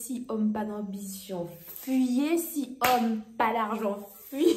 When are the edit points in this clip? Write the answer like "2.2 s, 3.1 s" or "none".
none